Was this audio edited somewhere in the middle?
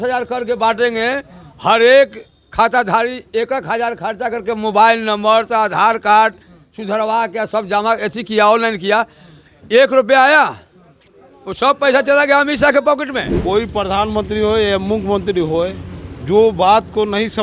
yes; 1 cut; at 13.3 s

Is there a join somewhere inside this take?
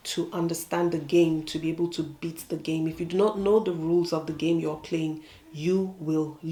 no; 0 cuts

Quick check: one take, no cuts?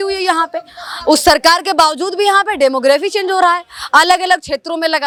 yes; 0 cuts

